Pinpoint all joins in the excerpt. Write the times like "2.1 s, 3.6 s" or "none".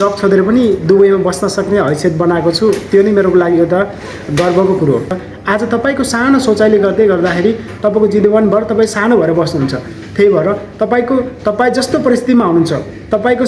5.3 s

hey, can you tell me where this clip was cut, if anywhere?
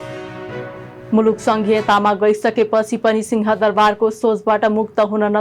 0.9 s

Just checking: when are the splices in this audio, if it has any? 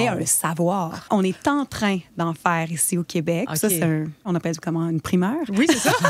1.1 s, 4.3 s

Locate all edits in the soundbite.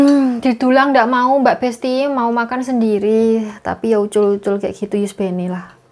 none

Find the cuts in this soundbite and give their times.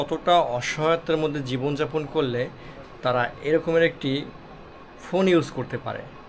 none

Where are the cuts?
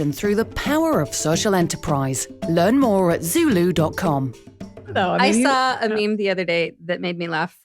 5.0 s

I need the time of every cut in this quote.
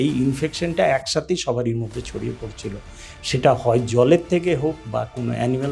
none

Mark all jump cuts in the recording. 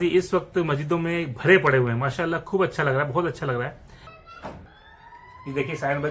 4.1 s

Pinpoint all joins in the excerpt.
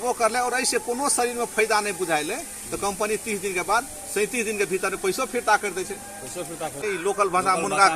6.8 s

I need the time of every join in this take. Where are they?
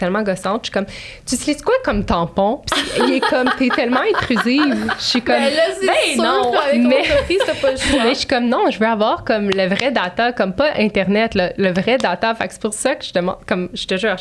none

